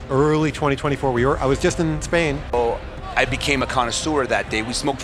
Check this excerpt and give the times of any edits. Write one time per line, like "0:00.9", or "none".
0:02.5